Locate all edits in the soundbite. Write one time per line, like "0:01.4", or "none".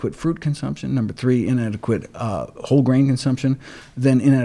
none